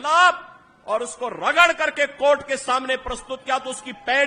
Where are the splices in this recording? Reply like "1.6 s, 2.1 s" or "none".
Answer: none